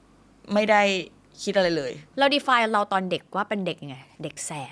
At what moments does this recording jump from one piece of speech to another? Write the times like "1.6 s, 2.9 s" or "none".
2.0 s